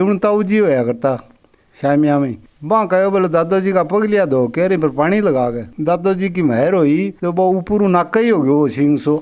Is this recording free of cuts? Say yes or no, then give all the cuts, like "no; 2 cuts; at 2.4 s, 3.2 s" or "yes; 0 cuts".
no; 2 cuts; at 2.5 s, 5.7 s